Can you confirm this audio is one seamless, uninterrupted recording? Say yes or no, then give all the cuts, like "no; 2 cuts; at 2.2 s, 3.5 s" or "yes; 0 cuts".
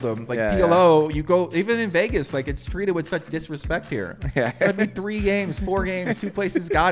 yes; 0 cuts